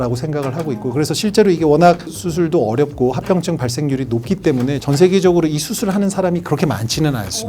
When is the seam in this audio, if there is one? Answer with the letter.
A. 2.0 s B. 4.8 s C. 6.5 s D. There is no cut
B